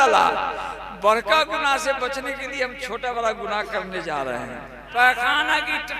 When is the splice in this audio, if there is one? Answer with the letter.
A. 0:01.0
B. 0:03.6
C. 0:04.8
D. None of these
C